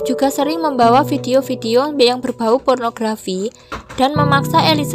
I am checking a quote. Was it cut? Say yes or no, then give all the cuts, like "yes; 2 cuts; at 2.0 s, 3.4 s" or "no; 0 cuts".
no; 0 cuts